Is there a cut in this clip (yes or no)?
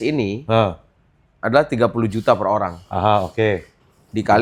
no